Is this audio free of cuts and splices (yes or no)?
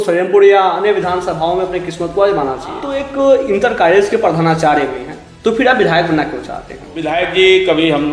no